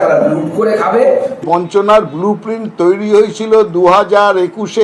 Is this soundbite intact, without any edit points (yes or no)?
no